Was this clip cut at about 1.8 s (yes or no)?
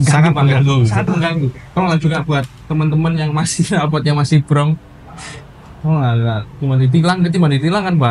yes